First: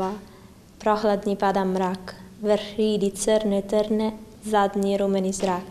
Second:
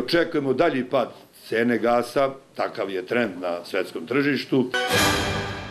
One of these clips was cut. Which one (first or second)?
second